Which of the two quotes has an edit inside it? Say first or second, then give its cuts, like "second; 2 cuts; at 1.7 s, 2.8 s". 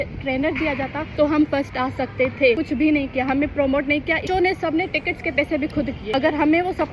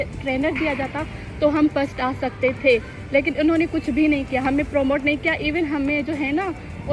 first; 4 cuts; at 1.0 s, 2.6 s, 4.2 s, 6.0 s